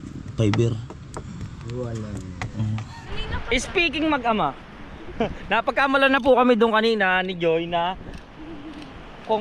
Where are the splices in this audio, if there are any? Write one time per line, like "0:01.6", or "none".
0:03.0